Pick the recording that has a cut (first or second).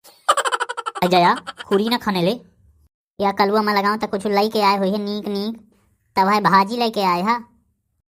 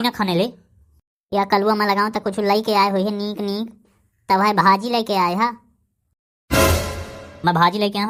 first